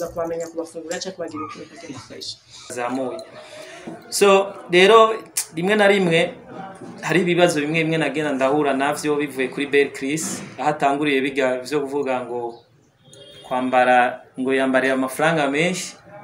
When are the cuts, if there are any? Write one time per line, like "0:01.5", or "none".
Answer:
0:02.7